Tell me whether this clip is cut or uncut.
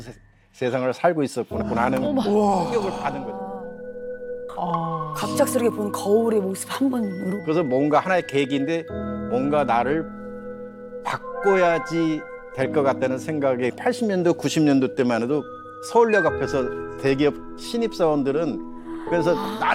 uncut